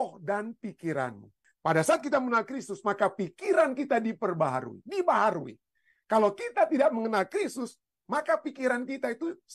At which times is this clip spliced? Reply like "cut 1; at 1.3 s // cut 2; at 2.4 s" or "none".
cut 1; at 1.5 s